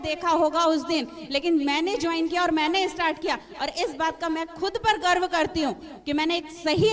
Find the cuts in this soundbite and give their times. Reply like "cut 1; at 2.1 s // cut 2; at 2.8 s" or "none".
none